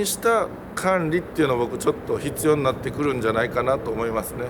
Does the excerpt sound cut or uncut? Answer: uncut